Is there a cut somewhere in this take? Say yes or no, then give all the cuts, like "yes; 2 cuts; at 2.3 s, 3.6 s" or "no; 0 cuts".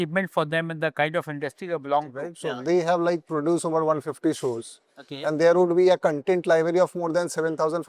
yes; 1 cut; at 2.3 s